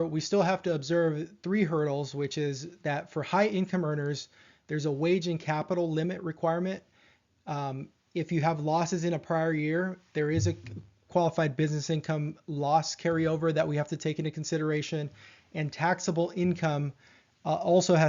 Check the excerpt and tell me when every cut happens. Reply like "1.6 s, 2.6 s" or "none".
10.4 s